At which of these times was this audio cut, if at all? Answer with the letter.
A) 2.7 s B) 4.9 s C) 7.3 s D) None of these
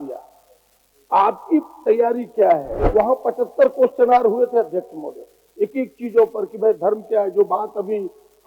A